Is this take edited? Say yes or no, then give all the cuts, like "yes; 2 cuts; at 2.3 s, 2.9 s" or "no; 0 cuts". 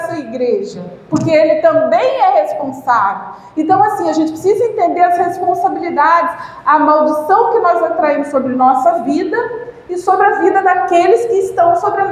no; 0 cuts